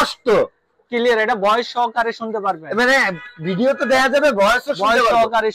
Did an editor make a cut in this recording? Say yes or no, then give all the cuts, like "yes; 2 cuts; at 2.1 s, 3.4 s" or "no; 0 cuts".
no; 0 cuts